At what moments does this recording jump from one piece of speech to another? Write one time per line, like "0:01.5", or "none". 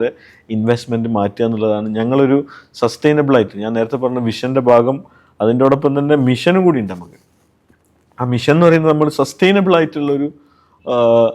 none